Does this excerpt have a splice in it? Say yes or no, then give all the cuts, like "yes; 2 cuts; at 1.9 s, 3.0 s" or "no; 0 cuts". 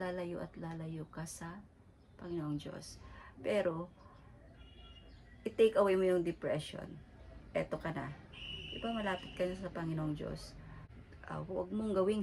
yes; 1 cut; at 10.5 s